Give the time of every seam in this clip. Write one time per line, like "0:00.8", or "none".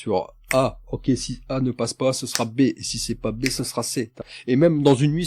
0:04.2